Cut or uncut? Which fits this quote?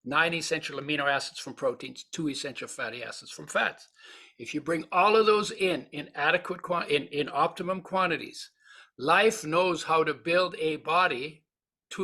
uncut